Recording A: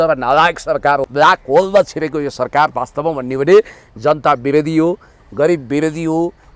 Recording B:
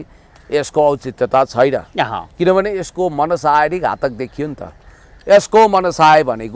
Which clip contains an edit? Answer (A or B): A